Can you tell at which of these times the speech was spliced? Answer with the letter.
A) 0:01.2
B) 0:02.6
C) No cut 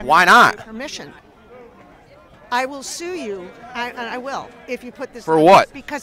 A